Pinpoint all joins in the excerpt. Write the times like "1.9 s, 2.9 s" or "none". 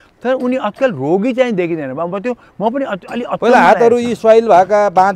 none